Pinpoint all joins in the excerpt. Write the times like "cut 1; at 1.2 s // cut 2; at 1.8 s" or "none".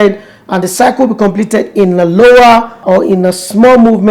cut 1; at 2.8 s